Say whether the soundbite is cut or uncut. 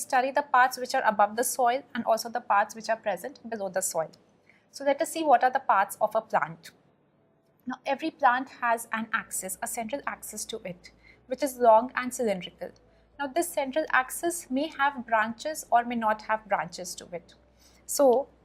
cut